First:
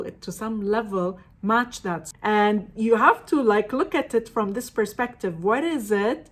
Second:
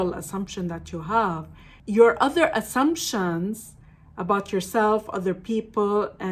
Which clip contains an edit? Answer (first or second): first